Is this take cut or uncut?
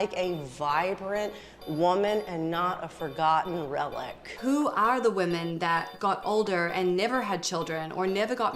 cut